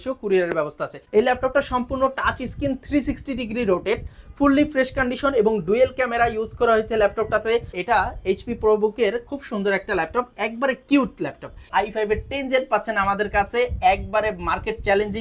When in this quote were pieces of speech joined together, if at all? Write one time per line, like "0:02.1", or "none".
0:00.9
0:07.8
0:11.7

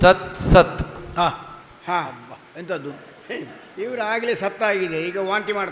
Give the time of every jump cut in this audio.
none

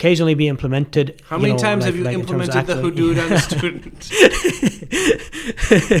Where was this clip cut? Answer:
none

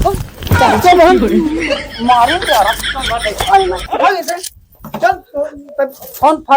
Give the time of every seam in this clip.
none

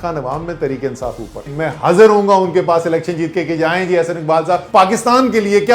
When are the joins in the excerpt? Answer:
0:01.5
0:04.6

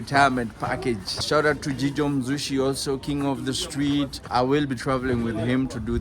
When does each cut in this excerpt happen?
0:01.2
0:04.3

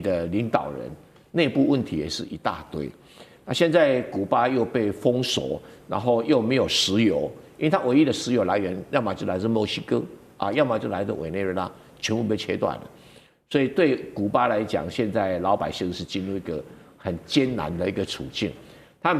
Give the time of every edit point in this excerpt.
none

